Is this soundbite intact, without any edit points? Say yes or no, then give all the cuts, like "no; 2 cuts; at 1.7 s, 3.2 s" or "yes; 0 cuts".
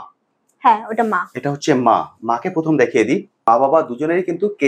no; 1 cut; at 3.4 s